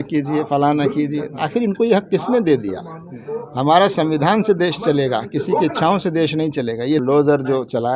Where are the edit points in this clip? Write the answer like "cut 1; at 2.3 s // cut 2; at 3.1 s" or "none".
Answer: cut 1; at 7.0 s